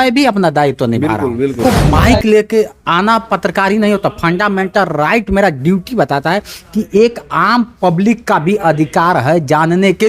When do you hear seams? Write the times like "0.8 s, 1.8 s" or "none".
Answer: 1.6 s